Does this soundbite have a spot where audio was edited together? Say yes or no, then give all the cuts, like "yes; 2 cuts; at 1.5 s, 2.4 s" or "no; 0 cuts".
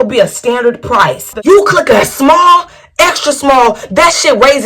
yes; 1 cut; at 1.3 s